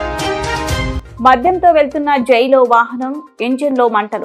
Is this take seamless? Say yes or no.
no